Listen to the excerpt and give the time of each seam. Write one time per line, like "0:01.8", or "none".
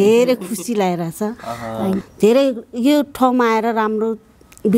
0:02.1